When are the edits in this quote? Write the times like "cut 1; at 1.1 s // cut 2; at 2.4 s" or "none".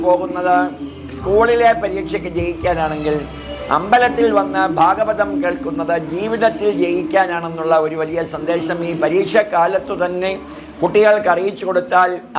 none